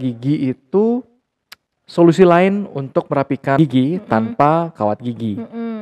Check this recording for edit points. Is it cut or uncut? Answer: cut